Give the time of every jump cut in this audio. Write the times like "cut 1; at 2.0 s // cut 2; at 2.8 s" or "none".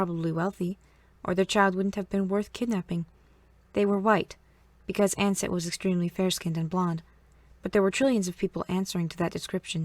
cut 1; at 2.5 s